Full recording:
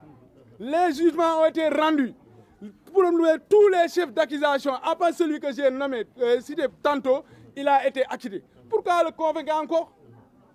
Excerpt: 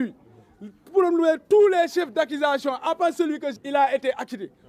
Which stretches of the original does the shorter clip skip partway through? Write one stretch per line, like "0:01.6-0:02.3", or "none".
0:05.5-0:07.4